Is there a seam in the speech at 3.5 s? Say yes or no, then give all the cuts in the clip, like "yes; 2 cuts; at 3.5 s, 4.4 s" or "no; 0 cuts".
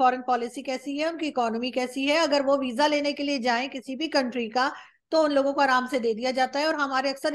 no; 0 cuts